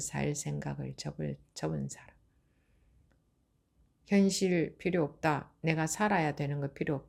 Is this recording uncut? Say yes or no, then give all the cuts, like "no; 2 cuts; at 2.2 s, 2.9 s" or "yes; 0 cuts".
yes; 0 cuts